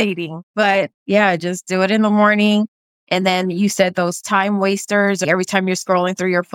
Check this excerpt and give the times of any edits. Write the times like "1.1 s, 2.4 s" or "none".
1.0 s, 5.2 s